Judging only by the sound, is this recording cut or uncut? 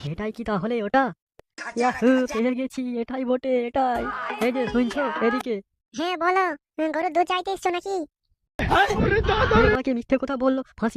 uncut